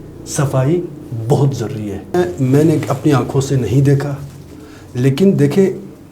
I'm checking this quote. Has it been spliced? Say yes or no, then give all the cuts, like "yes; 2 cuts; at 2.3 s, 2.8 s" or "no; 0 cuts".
yes; 1 cut; at 2.1 s